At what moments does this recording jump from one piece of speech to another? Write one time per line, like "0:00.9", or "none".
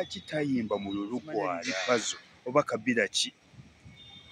0:01.7